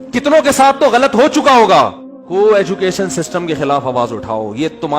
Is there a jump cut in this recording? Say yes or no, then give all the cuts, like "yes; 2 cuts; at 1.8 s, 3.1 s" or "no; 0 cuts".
yes; 1 cut; at 2.2 s